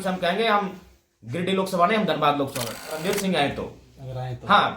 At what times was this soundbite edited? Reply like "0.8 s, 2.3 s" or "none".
3.0 s